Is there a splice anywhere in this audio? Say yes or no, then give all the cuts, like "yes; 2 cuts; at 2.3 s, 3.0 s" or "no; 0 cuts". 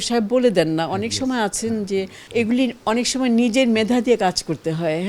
yes; 1 cut; at 2.2 s